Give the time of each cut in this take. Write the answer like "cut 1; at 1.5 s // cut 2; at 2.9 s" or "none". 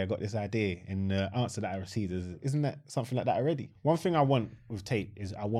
cut 1; at 2.4 s // cut 2; at 3.7 s